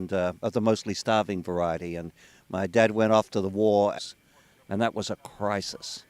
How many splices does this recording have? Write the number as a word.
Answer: zero